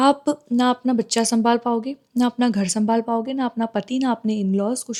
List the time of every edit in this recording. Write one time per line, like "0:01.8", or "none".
none